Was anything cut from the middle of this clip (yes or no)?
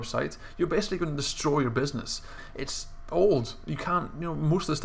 yes